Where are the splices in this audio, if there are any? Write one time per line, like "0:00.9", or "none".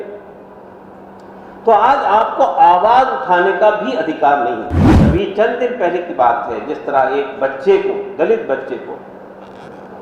0:04.9